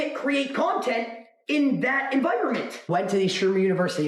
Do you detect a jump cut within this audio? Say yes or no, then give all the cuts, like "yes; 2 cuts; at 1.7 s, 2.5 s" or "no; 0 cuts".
yes; 1 cut; at 2.7 s